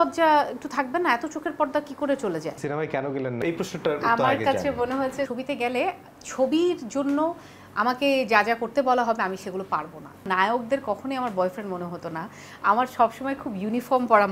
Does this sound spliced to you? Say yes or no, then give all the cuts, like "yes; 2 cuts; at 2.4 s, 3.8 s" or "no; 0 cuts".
yes; 3 cuts; at 2.6 s, 5.3 s, 10.2 s